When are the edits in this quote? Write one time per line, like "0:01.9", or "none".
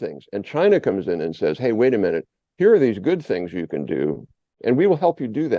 0:04.6